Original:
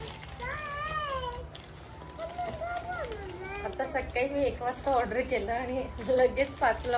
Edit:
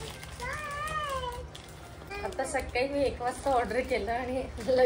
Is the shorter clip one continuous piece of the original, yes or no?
no